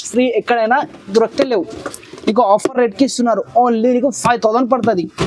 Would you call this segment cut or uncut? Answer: uncut